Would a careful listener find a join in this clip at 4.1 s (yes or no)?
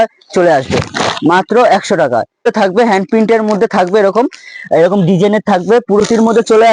no